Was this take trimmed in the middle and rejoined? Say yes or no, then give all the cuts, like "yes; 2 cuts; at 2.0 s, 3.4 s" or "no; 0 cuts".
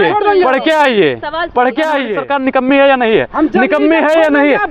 yes; 1 cut; at 2.2 s